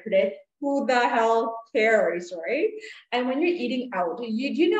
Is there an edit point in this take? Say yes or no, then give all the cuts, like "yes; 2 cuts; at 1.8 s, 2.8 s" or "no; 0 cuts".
yes; 1 cut; at 2.9 s